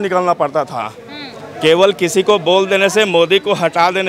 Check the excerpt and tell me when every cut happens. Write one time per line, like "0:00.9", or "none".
none

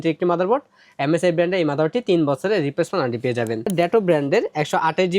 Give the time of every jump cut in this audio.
0:03.7

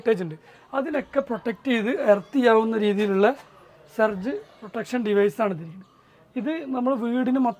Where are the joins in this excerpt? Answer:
none

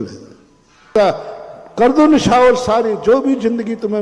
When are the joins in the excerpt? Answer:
0:00.9

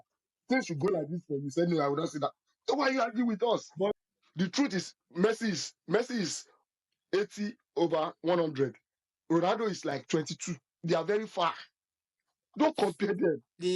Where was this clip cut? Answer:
0:03.9

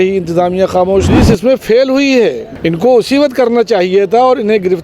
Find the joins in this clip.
0:01.1
0:02.5

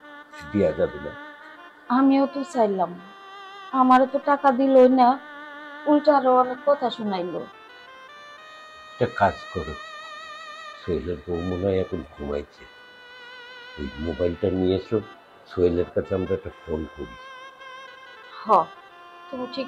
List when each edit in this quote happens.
none

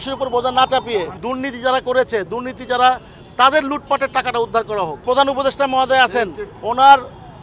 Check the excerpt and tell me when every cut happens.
0:01.2
0:05.0

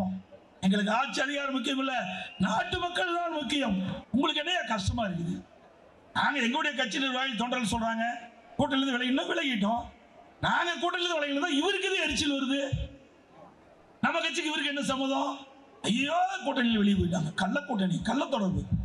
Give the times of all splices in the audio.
0:04.0

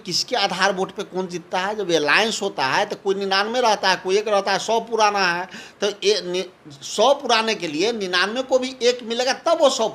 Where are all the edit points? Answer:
none

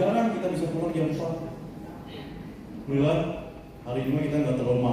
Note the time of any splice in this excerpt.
0:02.9

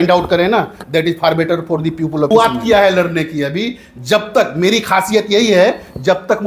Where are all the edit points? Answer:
0:02.3

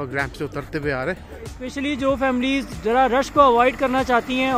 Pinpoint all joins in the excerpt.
0:01.6

